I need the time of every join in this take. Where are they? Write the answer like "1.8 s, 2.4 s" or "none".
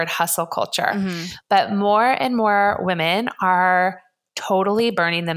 none